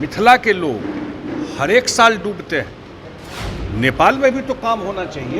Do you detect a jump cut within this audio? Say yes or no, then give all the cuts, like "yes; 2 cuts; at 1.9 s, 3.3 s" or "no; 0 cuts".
yes; 1 cut; at 3.4 s